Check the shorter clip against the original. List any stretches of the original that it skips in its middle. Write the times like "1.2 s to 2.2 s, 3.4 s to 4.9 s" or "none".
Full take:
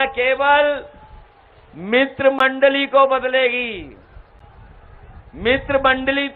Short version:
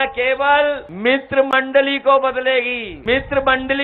0.9 s to 1.8 s, 3.7 s to 5.2 s